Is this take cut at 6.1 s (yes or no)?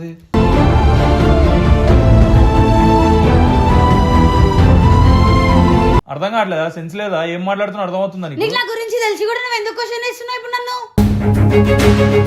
yes